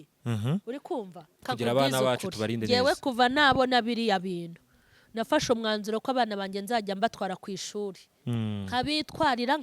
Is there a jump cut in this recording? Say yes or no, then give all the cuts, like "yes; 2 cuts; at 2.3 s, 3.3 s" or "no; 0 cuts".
yes; 1 cut; at 1.3 s